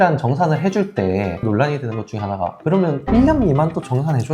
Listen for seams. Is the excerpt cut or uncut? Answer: cut